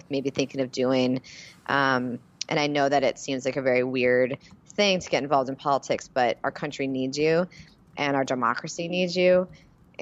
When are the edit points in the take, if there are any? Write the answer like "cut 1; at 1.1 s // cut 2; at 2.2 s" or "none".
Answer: none